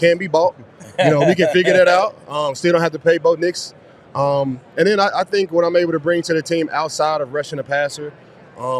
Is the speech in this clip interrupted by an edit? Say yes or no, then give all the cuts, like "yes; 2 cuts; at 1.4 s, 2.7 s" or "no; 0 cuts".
no; 0 cuts